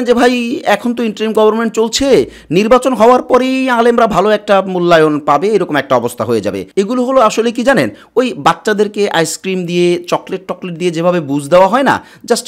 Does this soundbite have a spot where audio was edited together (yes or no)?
no